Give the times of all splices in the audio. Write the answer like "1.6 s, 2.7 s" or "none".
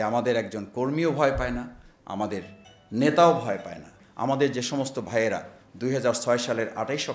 4.0 s